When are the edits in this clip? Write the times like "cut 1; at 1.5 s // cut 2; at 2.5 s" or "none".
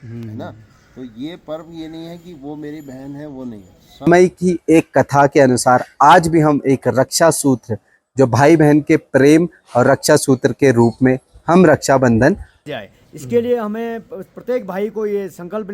cut 1; at 4.1 s // cut 2; at 12.6 s

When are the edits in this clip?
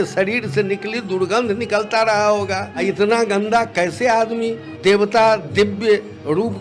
cut 1; at 2.7 s // cut 2; at 4.6 s

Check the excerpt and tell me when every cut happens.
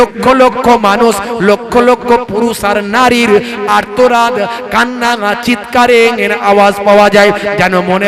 none

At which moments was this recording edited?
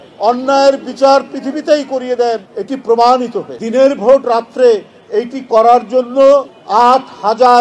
cut 1; at 2.5 s // cut 2; at 3.6 s // cut 3; at 6.6 s

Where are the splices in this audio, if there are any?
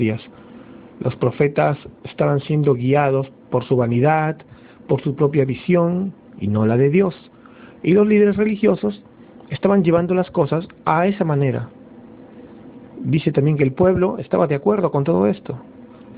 none

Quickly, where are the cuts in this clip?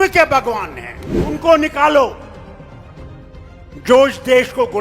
cut 1; at 1.3 s // cut 2; at 2.3 s // cut 3; at 3.7 s

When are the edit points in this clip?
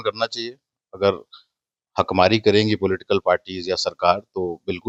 none

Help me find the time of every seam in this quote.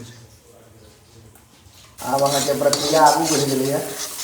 cut 1; at 1.9 s

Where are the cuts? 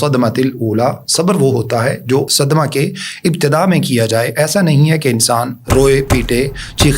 cut 1; at 2.3 s

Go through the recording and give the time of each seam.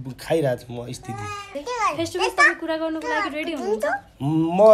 cut 1; at 1.5 s

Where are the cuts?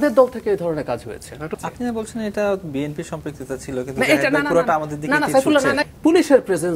cut 1; at 1.5 s // cut 2; at 5.8 s

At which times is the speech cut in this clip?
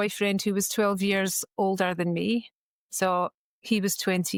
none

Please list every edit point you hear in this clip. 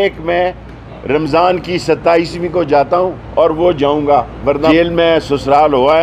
cut 1; at 4.7 s

